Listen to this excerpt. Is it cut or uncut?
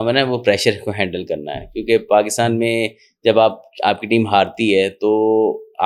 uncut